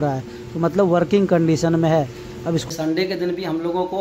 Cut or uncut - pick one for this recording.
cut